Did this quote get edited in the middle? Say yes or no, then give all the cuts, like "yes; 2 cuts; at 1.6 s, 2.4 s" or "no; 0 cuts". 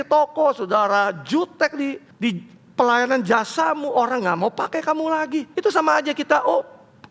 yes; 2 cuts; at 2.1 s, 5.5 s